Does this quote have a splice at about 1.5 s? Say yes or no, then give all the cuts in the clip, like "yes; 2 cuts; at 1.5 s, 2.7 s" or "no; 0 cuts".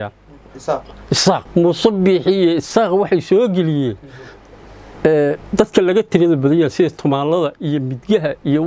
yes; 1 cut; at 1.5 s